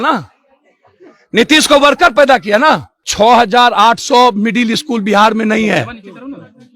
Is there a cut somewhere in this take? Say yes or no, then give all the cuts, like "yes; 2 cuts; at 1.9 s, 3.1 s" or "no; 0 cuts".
yes; 1 cut; at 3.1 s